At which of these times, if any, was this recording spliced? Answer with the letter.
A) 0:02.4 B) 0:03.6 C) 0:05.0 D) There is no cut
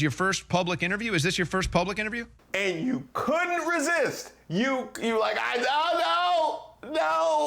A